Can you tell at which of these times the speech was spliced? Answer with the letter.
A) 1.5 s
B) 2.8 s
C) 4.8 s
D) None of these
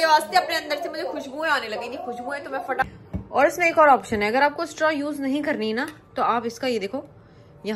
B